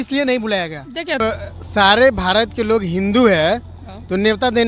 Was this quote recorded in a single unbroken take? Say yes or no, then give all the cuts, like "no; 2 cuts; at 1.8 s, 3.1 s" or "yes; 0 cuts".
no; 1 cut; at 1.2 s